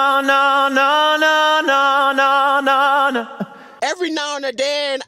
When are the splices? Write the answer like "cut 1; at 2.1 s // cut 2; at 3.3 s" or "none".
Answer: cut 1; at 3.7 s